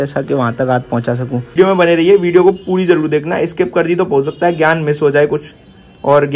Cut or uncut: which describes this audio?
cut